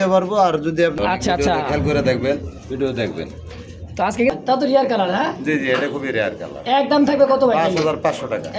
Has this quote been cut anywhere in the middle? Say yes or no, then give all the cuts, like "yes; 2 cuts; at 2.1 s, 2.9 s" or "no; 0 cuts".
yes; 2 cuts; at 0.9 s, 4.3 s